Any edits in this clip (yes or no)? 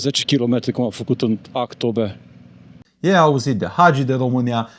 yes